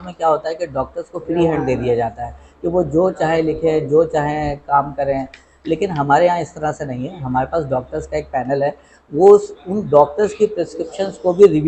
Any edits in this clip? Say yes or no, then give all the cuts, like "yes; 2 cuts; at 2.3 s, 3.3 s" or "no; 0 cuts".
no; 0 cuts